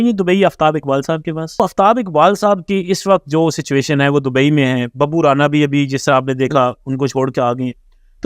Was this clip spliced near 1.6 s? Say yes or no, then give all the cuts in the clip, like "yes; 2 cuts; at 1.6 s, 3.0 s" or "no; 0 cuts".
yes; 1 cut; at 1.6 s